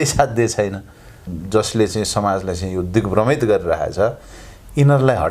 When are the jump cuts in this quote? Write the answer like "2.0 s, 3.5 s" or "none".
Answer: 1.2 s

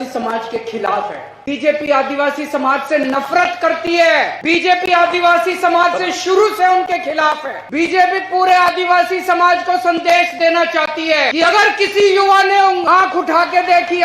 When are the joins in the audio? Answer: 1.3 s, 4.4 s, 7.6 s, 11.3 s, 12.8 s

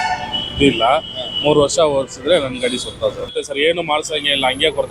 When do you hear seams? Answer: 3.3 s

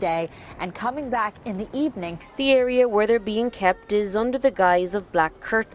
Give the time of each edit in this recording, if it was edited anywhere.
2.1 s

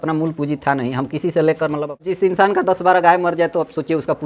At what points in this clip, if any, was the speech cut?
2.1 s

